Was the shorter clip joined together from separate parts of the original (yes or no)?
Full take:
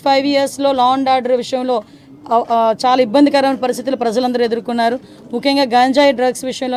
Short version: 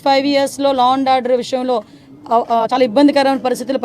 yes